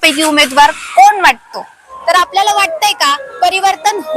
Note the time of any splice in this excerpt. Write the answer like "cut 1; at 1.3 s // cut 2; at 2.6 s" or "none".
cut 1; at 1.9 s

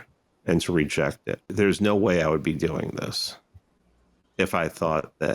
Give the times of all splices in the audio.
cut 1; at 1.5 s

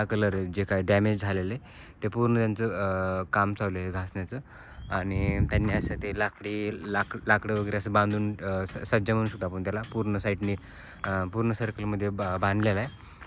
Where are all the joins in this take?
none

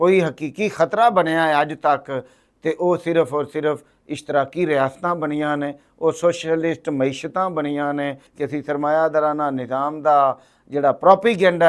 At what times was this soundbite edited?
cut 1; at 8.2 s

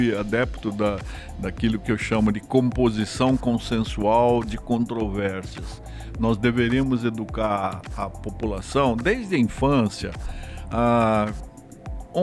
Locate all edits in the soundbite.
none

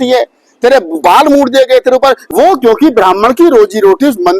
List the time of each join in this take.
cut 1; at 2.2 s

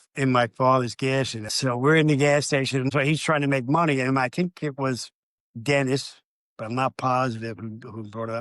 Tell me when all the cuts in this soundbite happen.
cut 1; at 1.5 s // cut 2; at 2.9 s

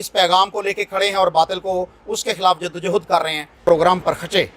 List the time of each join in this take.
cut 1; at 3.6 s

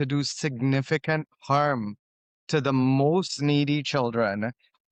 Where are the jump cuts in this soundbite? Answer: none

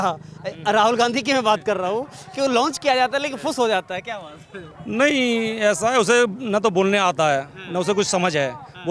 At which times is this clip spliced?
none

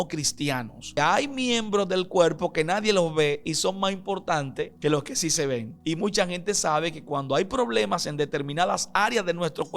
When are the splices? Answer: cut 1; at 1.0 s // cut 2; at 4.7 s // cut 3; at 5.7 s

